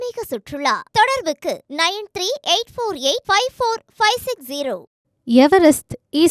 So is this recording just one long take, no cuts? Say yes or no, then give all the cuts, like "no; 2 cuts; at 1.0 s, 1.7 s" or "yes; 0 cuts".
yes; 0 cuts